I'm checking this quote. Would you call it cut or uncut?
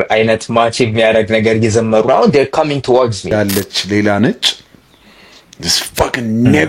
cut